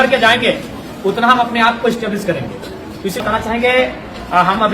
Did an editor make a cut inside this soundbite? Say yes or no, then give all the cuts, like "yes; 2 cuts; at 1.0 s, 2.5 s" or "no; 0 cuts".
yes; 1 cut; at 3.2 s